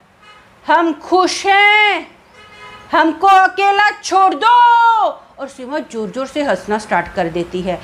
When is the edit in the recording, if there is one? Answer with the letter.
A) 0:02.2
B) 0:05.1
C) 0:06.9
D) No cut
D